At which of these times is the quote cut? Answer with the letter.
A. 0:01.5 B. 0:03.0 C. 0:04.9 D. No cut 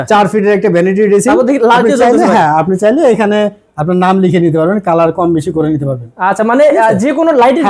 D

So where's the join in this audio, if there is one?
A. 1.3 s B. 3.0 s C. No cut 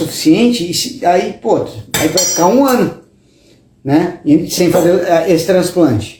C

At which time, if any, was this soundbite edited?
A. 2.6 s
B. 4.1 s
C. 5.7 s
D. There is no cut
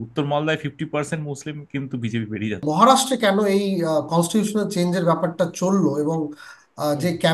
A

